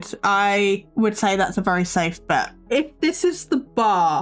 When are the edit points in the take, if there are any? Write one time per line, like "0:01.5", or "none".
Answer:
0:00.9
0:02.6